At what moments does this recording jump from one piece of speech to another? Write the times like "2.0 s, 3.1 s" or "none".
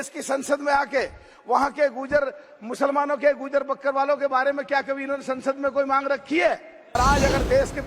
7.0 s